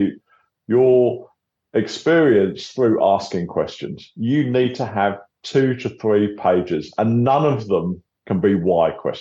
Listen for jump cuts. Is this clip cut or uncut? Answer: cut